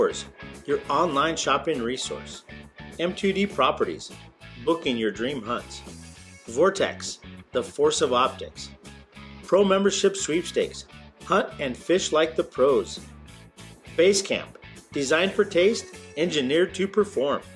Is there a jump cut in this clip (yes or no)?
no